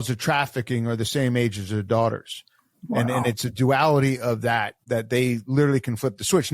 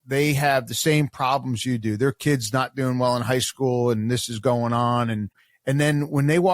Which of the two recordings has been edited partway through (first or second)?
second